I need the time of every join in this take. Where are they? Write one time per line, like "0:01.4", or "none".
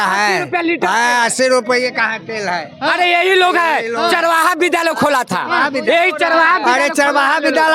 none